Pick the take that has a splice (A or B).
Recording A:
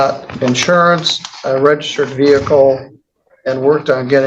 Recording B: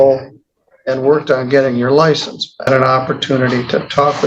B